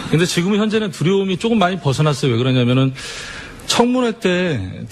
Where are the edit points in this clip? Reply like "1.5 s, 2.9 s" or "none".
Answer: none